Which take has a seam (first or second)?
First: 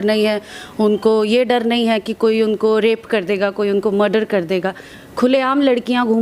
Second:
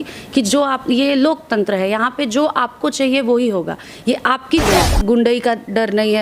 second